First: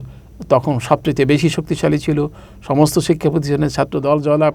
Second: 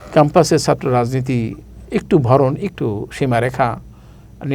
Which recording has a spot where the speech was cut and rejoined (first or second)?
second